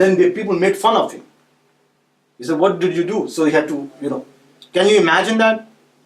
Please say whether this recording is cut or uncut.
uncut